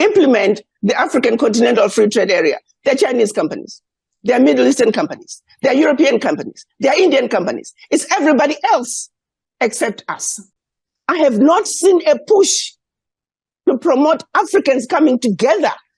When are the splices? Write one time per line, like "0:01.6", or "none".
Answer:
none